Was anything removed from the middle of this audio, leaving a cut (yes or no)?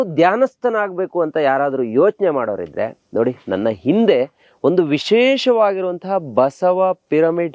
no